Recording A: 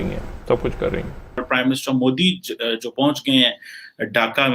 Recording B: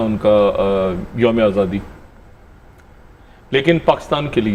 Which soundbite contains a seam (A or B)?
A